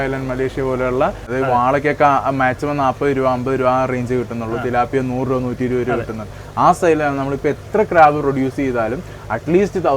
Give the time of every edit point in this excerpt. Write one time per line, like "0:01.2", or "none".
0:01.2